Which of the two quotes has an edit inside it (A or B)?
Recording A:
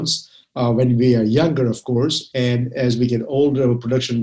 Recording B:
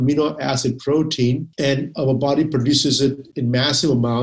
B